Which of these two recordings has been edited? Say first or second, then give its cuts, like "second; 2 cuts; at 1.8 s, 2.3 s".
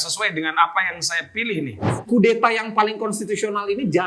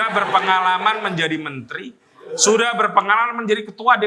first; 1 cut; at 1.9 s